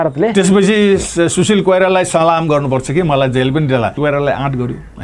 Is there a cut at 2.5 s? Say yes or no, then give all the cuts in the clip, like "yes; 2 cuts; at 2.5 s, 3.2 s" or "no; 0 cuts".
no; 1 cut; at 4.0 s